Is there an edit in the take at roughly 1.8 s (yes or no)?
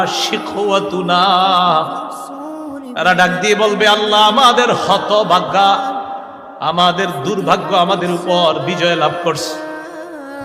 no